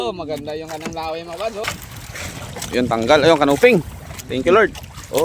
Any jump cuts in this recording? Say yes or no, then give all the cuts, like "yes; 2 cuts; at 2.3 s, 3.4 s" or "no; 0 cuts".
yes; 1 cut; at 1.6 s